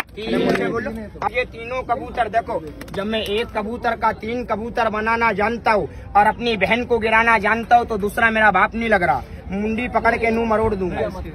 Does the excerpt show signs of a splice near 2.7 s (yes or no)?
no